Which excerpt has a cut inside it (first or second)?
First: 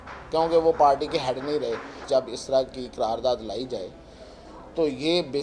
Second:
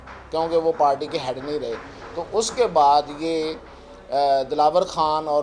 first